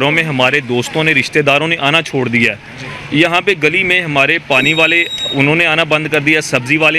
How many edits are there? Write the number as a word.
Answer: zero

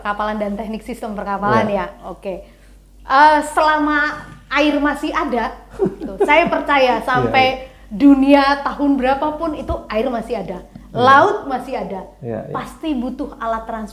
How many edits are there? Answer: zero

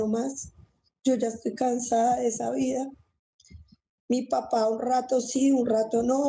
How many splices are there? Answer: zero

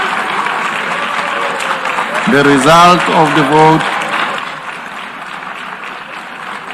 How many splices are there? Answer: zero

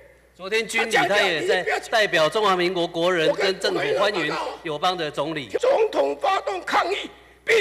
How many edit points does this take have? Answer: one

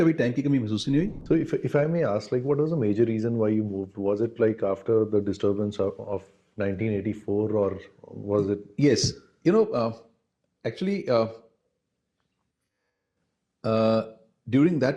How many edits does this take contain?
one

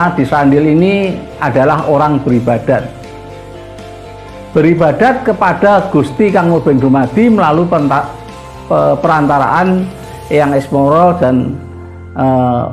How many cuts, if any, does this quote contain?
two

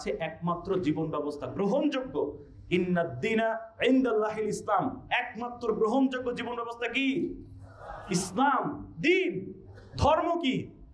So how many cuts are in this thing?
zero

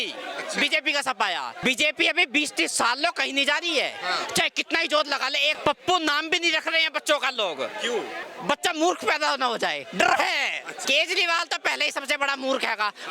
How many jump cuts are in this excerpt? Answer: four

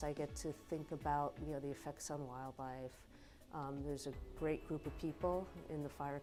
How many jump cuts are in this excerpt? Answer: zero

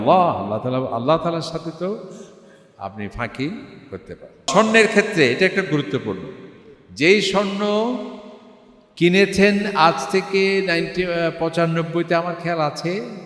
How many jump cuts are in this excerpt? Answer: one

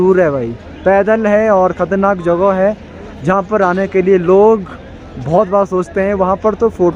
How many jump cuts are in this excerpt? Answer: zero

